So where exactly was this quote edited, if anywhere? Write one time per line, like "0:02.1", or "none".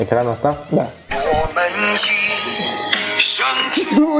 0:01.1

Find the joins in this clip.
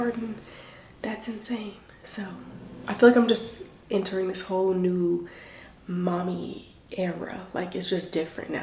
none

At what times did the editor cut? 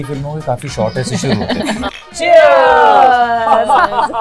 0:02.0

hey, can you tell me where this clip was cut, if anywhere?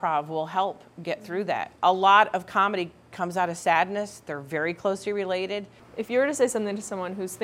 0:01.7
0:05.8

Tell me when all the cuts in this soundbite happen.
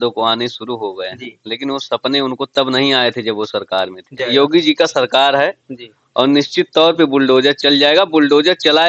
0:04.2

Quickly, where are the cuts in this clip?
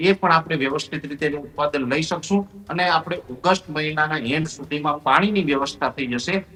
none

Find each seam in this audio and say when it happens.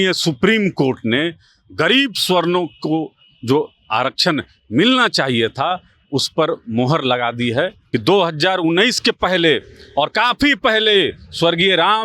0:07.8

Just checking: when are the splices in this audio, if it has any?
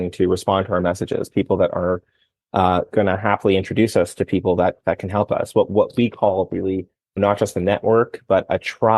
0:07.2

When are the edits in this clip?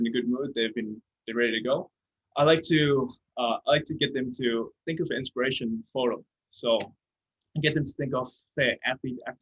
none

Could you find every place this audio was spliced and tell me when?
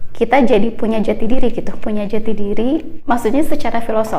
0:02.9

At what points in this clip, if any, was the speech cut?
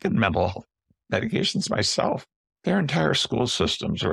0:02.2

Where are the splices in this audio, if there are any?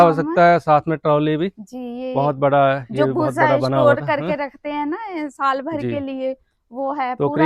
none

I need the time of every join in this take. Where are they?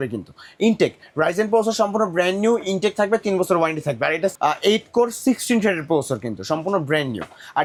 none

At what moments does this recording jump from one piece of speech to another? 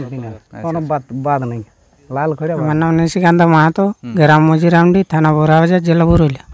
0:02.6

